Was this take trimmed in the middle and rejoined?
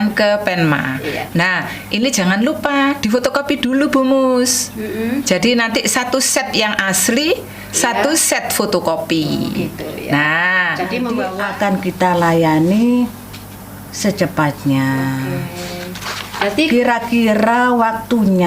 yes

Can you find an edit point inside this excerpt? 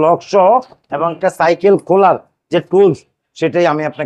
no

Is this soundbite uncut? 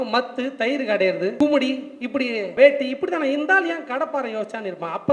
no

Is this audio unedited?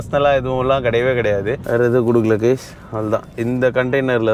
no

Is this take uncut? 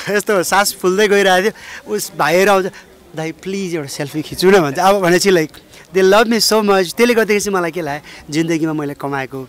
yes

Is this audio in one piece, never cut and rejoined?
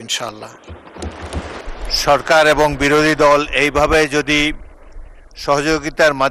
no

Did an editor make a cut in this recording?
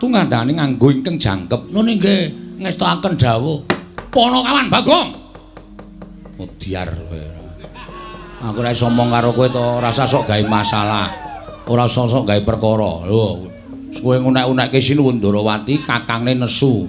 yes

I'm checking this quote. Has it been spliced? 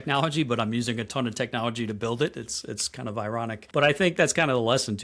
yes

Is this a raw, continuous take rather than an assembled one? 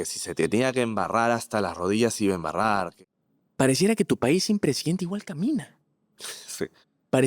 no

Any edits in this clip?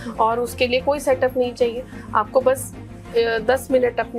no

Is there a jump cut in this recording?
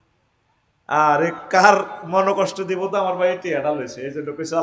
no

